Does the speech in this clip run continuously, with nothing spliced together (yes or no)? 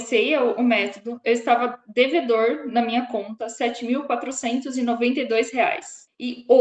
yes